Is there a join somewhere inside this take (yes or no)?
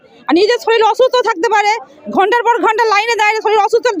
no